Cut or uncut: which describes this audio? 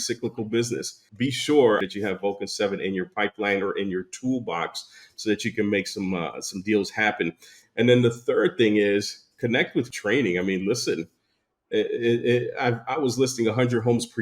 cut